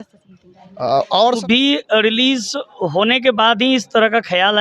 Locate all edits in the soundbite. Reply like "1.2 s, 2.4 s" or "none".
1.4 s